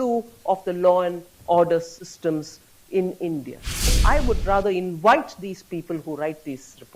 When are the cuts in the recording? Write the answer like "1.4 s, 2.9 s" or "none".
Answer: 4.0 s